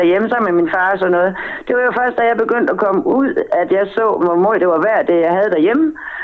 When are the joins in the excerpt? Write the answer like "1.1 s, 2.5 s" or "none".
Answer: 4.2 s